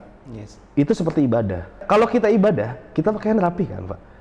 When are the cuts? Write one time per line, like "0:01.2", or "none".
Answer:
0:01.8